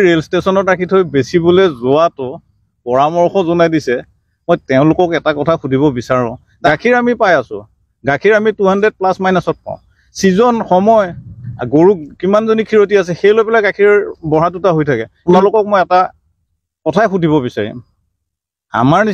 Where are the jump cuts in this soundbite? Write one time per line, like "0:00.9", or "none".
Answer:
0:06.7
0:15.2